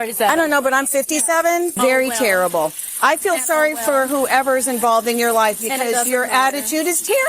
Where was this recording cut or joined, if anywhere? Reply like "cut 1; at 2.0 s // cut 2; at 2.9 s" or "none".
cut 1; at 1.7 s